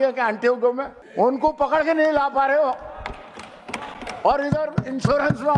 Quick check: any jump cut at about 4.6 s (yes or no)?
no